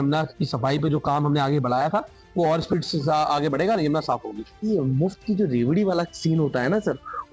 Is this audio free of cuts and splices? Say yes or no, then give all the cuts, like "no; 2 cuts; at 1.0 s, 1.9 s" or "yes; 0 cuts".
no; 1 cut; at 4.6 s